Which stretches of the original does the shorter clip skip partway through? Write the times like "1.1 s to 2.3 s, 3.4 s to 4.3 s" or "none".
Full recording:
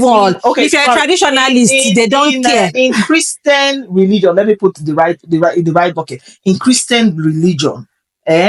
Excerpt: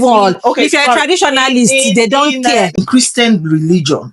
2.8 s to 6.5 s